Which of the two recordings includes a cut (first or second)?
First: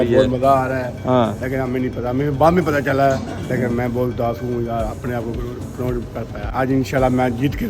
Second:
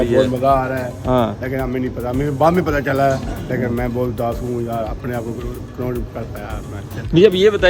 first